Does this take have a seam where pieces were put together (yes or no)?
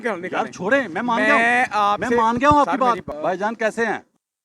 yes